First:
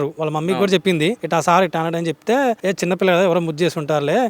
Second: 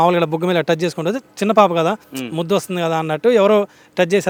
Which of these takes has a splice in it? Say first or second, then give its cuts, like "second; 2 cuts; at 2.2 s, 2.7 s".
first; 2 cuts; at 1.2 s, 2.6 s